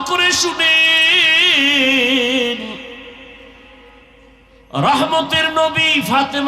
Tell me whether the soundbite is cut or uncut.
uncut